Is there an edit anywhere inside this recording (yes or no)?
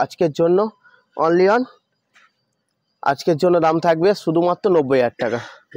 no